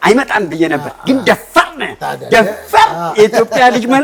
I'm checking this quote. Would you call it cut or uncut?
uncut